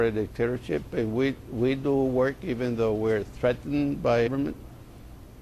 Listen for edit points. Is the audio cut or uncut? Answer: uncut